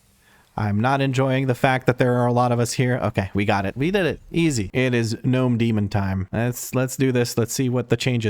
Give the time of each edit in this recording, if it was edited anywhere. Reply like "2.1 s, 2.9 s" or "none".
4.7 s